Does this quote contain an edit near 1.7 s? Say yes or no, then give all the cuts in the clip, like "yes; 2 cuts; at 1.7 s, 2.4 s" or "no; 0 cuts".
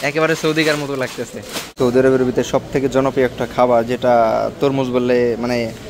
yes; 1 cut; at 1.7 s